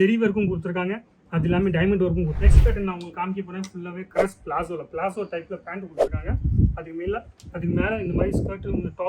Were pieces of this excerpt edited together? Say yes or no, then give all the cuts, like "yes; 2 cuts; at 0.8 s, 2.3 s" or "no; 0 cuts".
yes; 1 cut; at 2.4 s